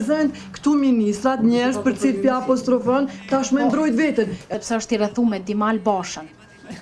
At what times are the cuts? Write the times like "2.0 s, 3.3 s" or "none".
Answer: 4.4 s